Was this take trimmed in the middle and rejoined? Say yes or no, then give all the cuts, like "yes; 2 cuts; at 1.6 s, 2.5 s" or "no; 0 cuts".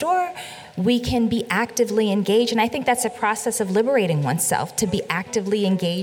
no; 0 cuts